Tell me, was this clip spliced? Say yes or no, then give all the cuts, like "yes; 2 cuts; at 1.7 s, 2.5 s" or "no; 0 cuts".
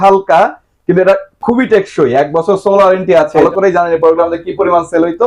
yes; 1 cut; at 3.4 s